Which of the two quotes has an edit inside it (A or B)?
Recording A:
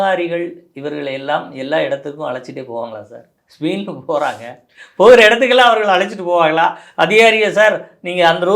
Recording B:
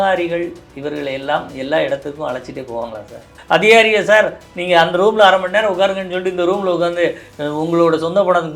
B